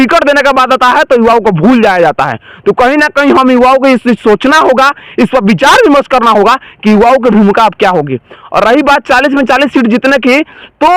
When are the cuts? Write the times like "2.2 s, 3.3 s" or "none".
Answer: none